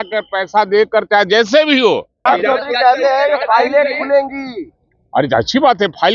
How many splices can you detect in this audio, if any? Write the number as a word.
one